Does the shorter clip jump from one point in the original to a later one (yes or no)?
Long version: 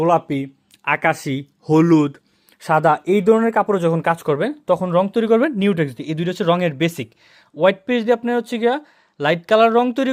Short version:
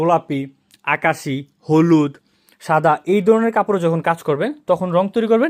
no